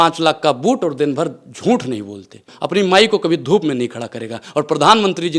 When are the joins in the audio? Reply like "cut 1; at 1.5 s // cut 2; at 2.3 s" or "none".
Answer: cut 1; at 2.5 s